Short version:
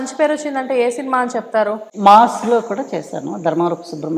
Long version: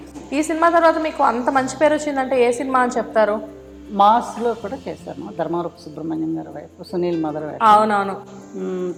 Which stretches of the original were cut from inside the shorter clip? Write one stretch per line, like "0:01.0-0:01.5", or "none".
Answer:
0:03.5-0:03.8